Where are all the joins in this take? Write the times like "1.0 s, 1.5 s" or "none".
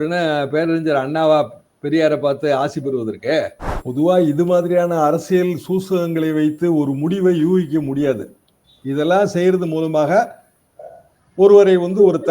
3.6 s